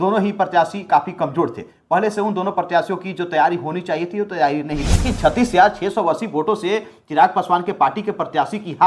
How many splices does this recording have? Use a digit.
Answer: 1